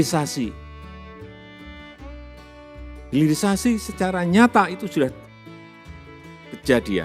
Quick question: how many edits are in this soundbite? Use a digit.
2